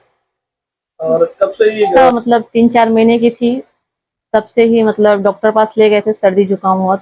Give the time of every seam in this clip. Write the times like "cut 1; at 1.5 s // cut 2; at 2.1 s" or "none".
cut 1; at 2.0 s